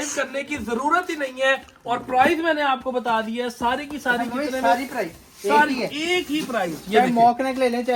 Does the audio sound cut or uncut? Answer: uncut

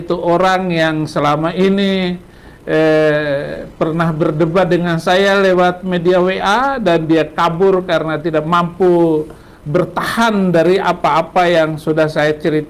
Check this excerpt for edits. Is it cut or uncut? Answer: uncut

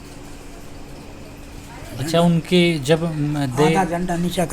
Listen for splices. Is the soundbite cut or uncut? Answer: cut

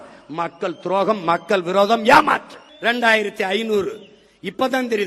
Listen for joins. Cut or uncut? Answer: cut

